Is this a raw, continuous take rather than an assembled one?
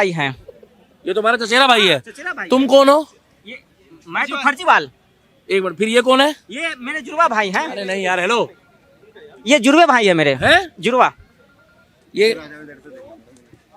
yes; 0 cuts

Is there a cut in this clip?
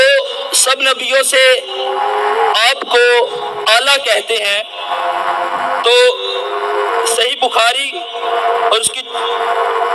no; 0 cuts

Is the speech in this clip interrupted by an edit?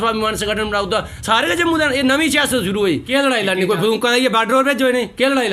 yes; 1 cut; at 3.0 s

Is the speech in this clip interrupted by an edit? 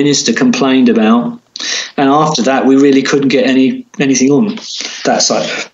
no; 0 cuts

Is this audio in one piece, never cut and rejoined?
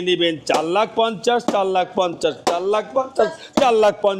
yes; 0 cuts

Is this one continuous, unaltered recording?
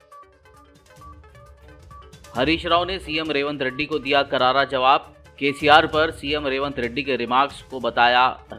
no; 1 cut; at 1.1 s

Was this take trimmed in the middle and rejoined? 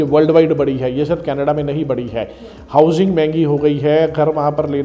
no; 0 cuts

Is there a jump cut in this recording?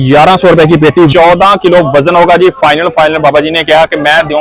yes; 1 cut; at 1.1 s

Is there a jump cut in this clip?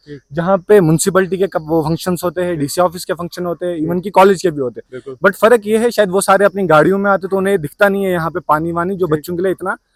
no; 0 cuts

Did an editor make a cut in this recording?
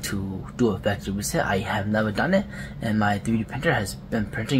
no; 0 cuts

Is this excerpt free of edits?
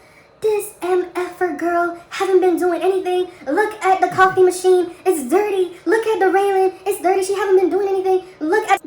yes; 0 cuts

